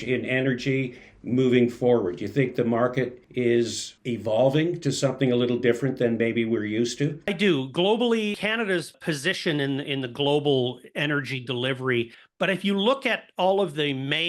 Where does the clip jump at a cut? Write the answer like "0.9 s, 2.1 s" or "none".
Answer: 3.2 s, 3.9 s, 7.3 s